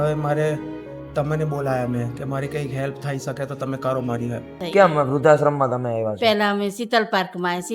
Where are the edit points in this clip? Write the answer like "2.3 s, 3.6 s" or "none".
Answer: 4.5 s